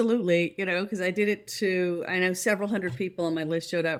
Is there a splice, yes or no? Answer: no